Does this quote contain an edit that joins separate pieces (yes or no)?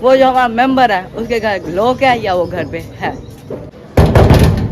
no